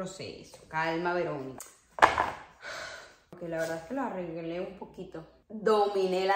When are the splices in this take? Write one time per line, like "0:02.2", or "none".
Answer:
0:05.3